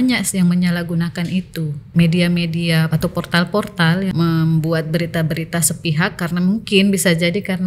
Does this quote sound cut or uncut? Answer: cut